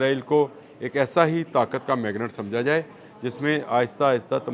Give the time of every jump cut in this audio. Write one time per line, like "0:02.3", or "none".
none